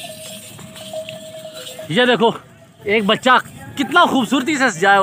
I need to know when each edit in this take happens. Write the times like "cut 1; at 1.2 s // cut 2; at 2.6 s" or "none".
cut 1; at 1.8 s